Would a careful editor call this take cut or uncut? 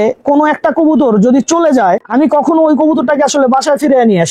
uncut